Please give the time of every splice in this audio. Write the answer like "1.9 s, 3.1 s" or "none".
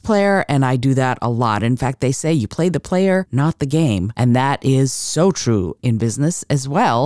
3.6 s, 5.8 s